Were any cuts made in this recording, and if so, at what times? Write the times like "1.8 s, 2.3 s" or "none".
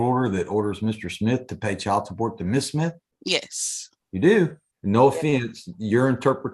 3.1 s, 4.7 s